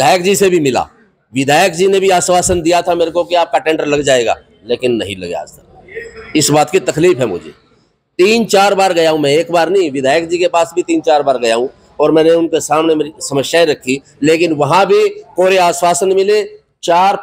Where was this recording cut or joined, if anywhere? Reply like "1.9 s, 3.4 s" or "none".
14.1 s